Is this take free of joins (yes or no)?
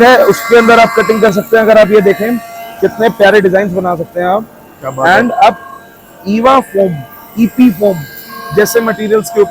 yes